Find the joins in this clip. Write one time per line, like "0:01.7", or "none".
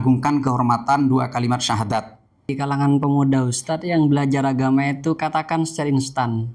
0:02.6